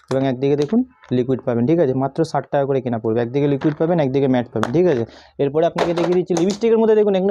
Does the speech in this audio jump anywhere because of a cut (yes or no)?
no